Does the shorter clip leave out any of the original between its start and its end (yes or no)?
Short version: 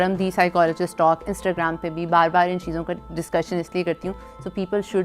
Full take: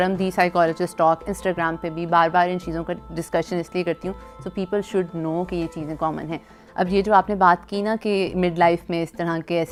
no